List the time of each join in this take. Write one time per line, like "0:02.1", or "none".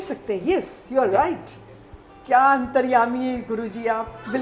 none

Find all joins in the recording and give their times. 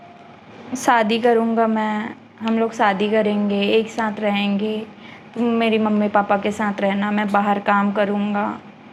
none

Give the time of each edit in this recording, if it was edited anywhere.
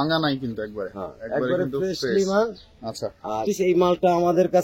0:03.5

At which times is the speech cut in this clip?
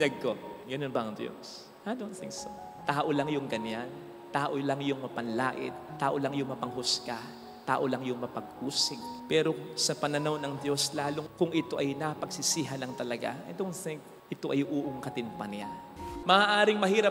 0:16.0

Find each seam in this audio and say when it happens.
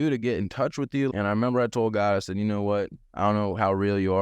0:01.1

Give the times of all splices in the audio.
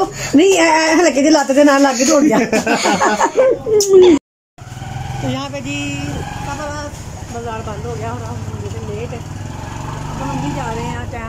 0:04.3

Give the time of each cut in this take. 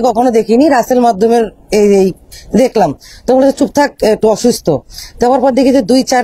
none

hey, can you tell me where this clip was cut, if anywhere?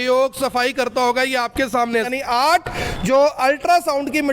0:02.1

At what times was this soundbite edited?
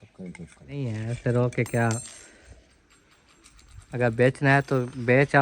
0:01.0

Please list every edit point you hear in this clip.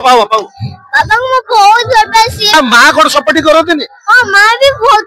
0:02.5

